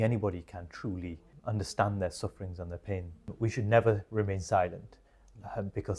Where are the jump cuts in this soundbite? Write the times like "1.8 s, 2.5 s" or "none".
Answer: 1.3 s, 3.3 s